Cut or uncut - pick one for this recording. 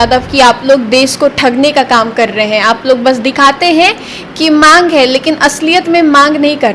uncut